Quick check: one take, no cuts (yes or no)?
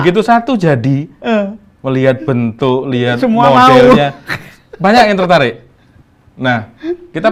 yes